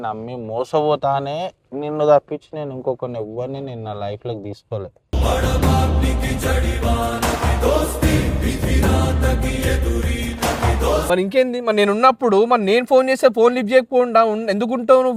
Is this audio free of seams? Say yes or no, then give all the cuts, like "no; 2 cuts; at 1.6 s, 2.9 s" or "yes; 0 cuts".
yes; 0 cuts